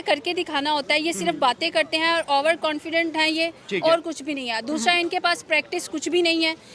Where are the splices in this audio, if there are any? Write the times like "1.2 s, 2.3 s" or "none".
none